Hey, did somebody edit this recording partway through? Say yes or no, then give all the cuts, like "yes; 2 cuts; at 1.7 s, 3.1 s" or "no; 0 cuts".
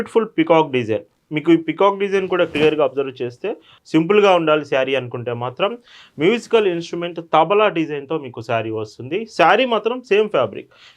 yes; 1 cut; at 3.7 s